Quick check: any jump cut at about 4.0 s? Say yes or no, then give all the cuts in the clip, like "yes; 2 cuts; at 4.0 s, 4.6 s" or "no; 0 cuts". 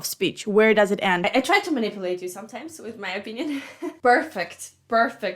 yes; 2 cuts; at 1.3 s, 4.0 s